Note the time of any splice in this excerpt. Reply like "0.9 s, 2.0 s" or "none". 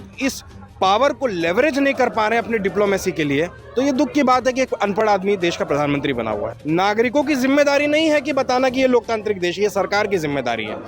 6.5 s